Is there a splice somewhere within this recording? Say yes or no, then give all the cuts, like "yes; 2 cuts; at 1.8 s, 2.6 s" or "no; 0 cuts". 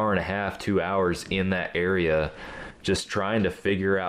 no; 0 cuts